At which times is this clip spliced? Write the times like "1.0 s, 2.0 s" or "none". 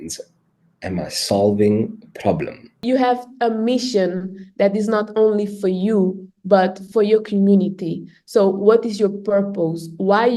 2.8 s